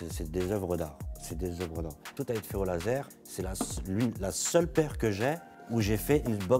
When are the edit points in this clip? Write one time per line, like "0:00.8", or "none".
0:02.1
0:03.2
0:05.5